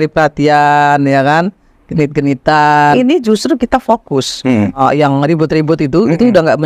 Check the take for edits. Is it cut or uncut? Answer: cut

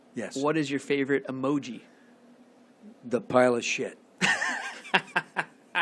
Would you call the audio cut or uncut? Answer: cut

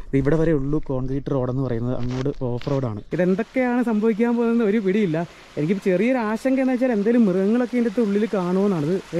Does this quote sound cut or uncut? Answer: cut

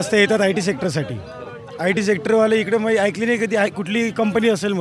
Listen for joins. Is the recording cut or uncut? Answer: uncut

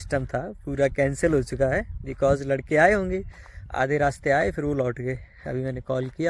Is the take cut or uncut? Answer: uncut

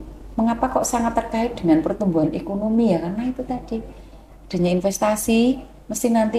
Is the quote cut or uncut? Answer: uncut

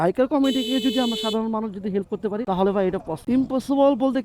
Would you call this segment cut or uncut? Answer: cut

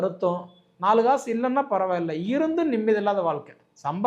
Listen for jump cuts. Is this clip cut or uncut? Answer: uncut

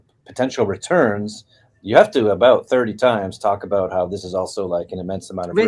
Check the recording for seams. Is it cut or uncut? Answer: uncut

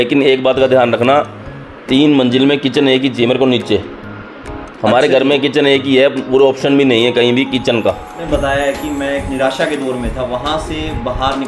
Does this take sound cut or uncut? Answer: cut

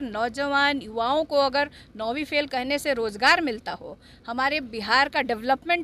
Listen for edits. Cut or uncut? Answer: uncut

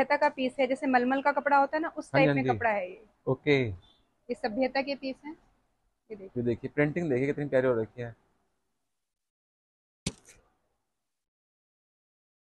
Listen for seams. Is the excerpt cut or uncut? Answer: uncut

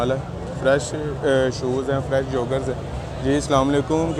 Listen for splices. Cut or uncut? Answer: uncut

